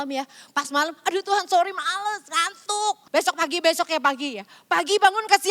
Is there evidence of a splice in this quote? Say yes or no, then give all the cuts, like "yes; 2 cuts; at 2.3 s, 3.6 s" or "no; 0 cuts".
yes; 1 cut; at 3.0 s